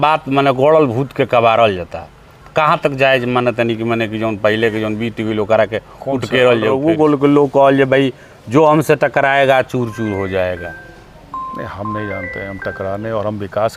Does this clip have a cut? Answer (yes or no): yes